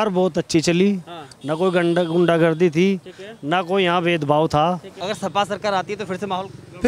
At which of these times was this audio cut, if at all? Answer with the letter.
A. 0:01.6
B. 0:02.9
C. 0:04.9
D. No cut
C